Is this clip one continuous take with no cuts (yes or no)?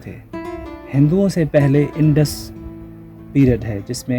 yes